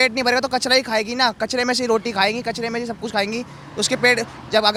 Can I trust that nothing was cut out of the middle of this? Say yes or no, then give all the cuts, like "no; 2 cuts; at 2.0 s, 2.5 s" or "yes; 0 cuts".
yes; 0 cuts